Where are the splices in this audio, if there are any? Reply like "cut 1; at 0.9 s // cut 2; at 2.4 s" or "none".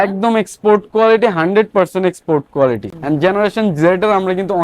cut 1; at 2.9 s